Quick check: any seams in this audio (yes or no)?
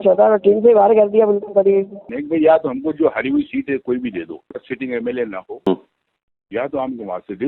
yes